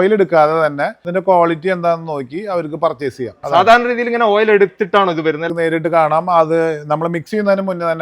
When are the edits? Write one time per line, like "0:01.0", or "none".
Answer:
0:00.9
0:03.4
0:05.5